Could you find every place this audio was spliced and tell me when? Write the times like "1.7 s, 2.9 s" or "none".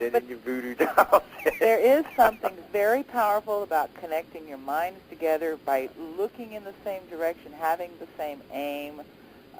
1.9 s